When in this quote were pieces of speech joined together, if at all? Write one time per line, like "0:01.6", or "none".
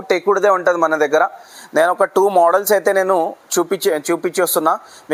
none